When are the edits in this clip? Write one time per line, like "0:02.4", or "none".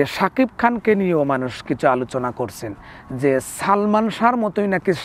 none